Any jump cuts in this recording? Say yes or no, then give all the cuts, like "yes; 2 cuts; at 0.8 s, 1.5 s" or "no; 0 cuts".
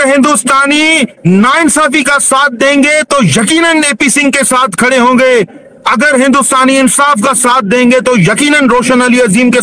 no; 0 cuts